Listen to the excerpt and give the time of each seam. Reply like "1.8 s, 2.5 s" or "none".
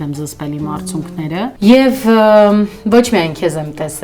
1.5 s

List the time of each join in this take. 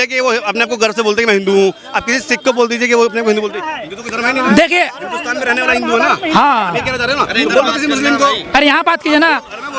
none

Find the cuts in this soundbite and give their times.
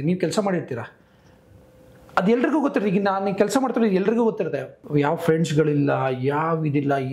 4.8 s

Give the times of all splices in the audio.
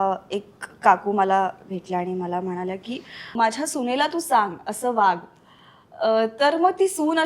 3.3 s

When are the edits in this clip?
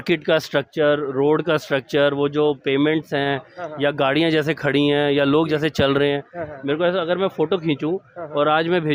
none

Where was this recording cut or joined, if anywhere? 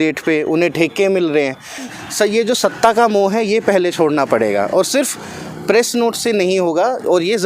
1.9 s

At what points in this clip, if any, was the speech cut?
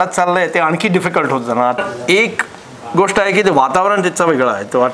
1.8 s

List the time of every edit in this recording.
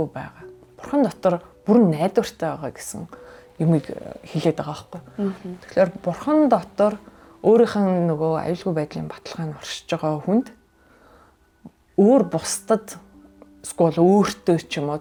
none

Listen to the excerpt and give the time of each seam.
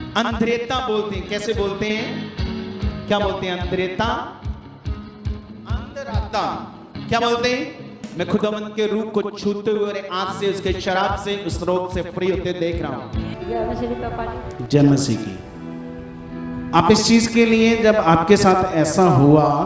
13.3 s

